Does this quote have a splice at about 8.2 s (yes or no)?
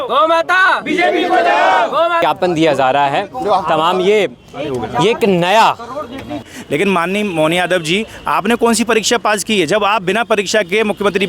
no